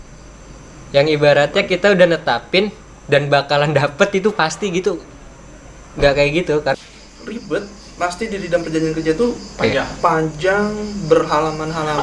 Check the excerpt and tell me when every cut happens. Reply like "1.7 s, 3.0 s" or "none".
6.8 s

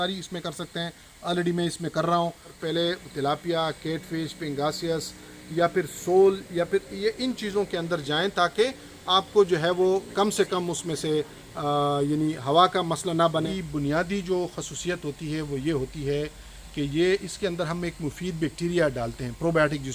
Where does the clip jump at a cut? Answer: 2.6 s, 13.5 s

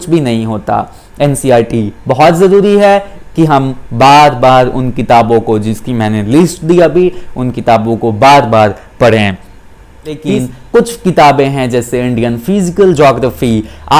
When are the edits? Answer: 10.2 s

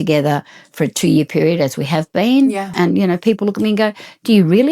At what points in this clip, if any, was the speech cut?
2.7 s

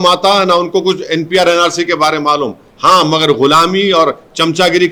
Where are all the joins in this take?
none

